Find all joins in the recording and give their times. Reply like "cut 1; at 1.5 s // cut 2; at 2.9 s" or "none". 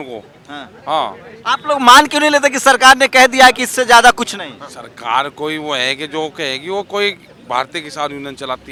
none